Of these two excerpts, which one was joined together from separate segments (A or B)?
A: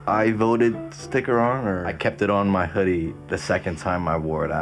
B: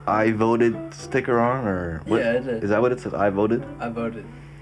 A